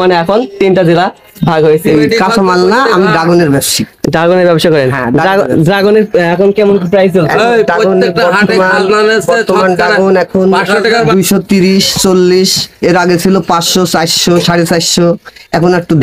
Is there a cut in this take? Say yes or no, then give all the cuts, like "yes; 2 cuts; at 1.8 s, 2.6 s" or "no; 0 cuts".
no; 0 cuts